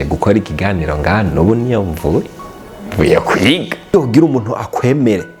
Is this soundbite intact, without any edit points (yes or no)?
no